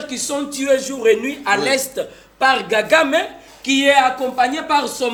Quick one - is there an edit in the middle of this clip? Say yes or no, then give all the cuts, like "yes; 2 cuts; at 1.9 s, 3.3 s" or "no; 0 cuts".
no; 0 cuts